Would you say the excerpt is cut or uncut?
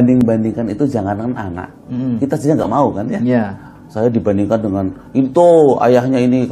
uncut